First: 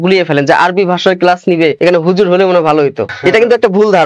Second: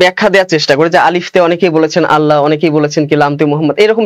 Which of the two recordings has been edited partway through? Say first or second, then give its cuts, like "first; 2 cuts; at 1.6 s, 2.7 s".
first; 2 cuts; at 1.8 s, 3.1 s